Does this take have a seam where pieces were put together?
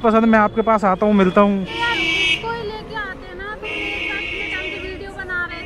no; 0 cuts

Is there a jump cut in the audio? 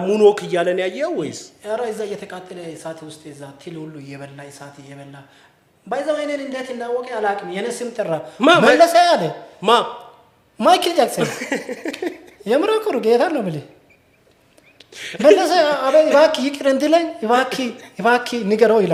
no; 0 cuts

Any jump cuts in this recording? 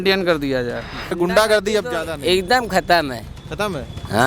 yes; 1 cut; at 1.1 s

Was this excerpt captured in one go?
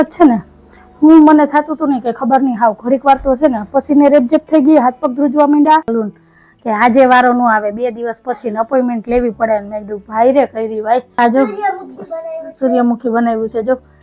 no; 2 cuts; at 5.9 s, 11.2 s

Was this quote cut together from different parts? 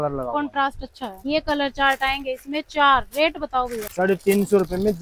yes; 2 cuts; at 1.1 s, 3.8 s

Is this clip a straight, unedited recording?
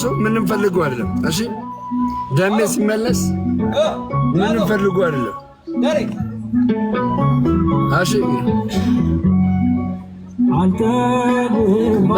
yes; 0 cuts

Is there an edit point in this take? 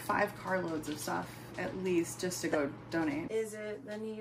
yes; 1 cut; at 3.3 s

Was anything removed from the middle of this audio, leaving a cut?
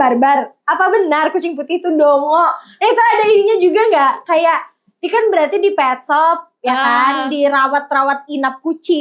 no; 0 cuts

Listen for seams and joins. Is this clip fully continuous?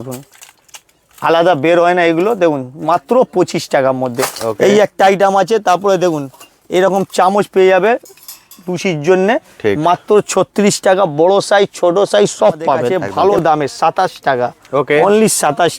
no; 1 cut; at 13.0 s

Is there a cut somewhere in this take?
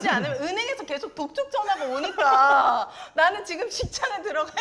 no; 0 cuts

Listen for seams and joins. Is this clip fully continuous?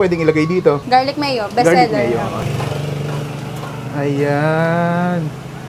no; 2 cuts; at 0.8 s, 2.4 s

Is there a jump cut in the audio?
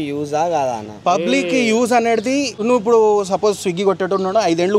yes; 1 cut; at 2.5 s

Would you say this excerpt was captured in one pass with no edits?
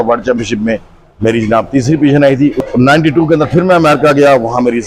no; 1 cut; at 2.7 s

